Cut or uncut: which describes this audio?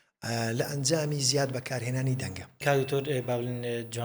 cut